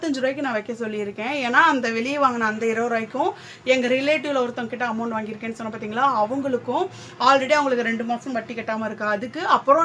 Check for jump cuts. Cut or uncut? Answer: uncut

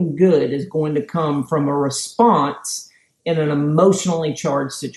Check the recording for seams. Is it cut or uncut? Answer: uncut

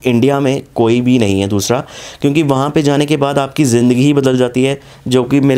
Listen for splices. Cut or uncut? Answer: uncut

